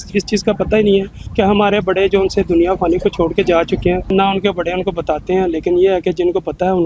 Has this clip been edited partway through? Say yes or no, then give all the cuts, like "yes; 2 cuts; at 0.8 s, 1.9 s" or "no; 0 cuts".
yes; 2 cuts; at 1.2 s, 4.1 s